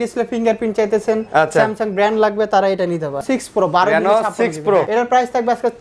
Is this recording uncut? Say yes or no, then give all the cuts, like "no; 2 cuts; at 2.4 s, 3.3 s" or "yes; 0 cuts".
no; 2 cuts; at 3.2 s, 4.9 s